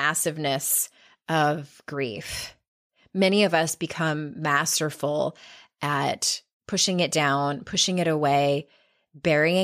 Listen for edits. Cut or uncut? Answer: uncut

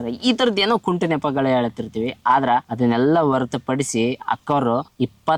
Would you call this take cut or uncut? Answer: uncut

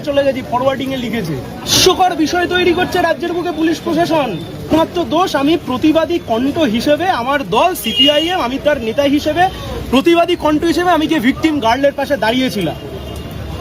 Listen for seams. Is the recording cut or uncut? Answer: cut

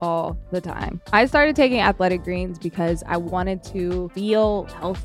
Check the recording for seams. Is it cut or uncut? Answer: cut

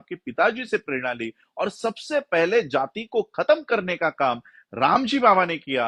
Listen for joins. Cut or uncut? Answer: uncut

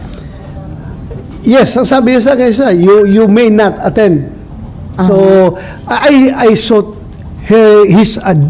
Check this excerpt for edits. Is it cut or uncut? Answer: uncut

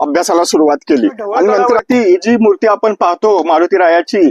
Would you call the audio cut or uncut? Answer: cut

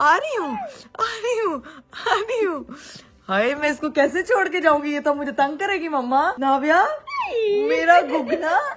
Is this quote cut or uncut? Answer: uncut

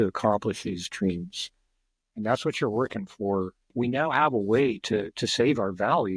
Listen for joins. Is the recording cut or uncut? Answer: cut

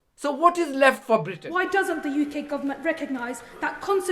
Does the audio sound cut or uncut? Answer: cut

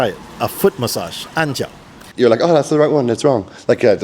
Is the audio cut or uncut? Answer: cut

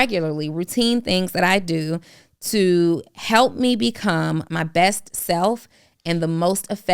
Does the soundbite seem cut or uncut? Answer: cut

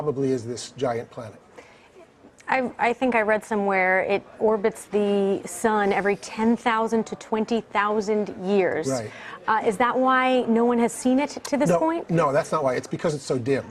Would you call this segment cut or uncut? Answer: cut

